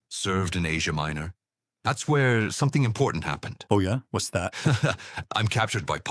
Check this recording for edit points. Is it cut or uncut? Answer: uncut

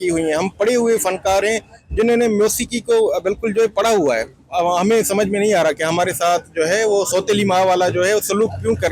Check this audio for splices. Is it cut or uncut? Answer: cut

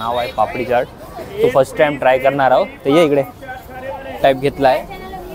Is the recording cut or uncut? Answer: cut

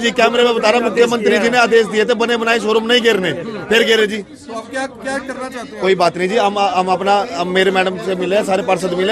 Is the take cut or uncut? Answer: uncut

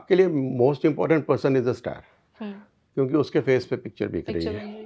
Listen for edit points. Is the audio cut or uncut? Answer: uncut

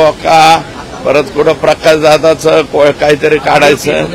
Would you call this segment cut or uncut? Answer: uncut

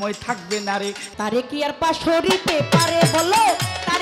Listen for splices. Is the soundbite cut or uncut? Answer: cut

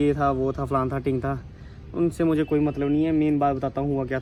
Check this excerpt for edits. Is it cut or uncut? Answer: uncut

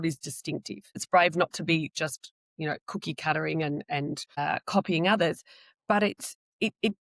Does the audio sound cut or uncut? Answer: cut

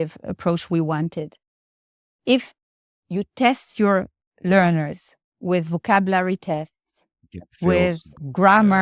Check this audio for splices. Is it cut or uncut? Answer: uncut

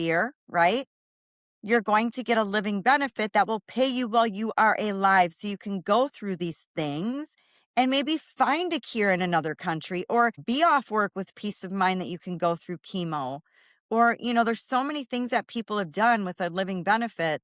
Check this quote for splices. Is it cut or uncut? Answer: cut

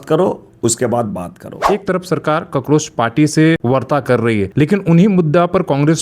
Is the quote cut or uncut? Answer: cut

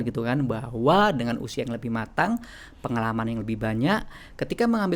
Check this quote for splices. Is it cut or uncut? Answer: uncut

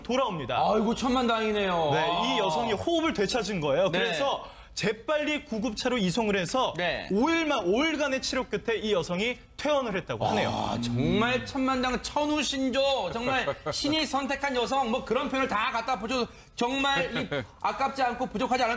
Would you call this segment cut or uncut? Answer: cut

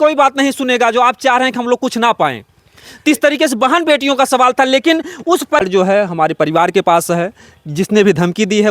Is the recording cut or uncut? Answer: cut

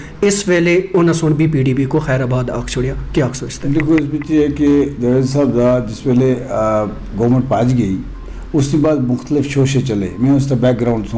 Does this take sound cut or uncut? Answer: uncut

